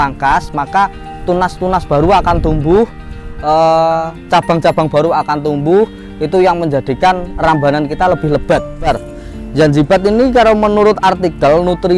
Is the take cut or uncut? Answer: cut